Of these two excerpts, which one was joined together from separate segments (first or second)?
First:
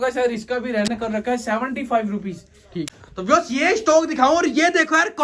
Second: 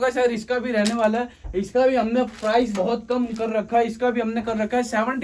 first